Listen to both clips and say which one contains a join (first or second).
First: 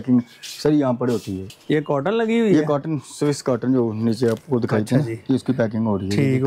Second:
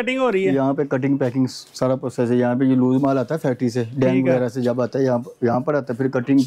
first